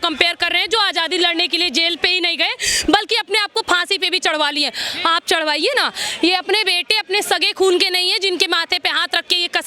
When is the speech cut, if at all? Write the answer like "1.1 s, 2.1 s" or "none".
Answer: none